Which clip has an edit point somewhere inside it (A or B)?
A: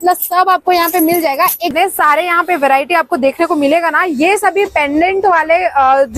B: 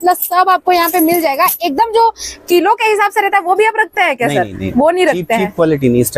A